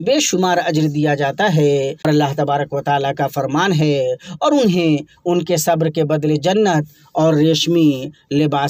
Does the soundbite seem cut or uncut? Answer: cut